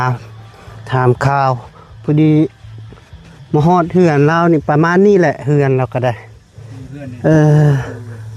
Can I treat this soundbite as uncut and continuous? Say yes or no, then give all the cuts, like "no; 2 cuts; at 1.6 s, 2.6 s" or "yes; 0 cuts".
yes; 0 cuts